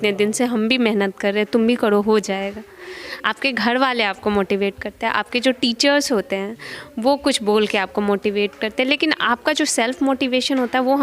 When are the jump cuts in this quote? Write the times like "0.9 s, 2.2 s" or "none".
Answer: none